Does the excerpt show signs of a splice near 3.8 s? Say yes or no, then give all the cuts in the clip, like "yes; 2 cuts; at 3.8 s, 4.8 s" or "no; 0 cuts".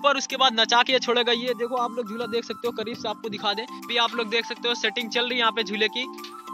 yes; 1 cut; at 3.8 s